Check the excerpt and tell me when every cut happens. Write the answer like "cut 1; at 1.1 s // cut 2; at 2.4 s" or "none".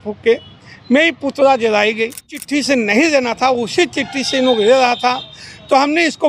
cut 1; at 2.3 s

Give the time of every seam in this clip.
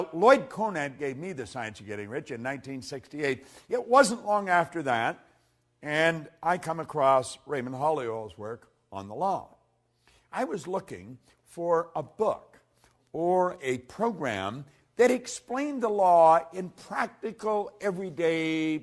cut 1; at 16.5 s

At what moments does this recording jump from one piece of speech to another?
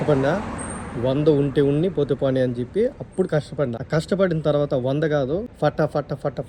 cut 1; at 3.8 s // cut 2; at 5.5 s

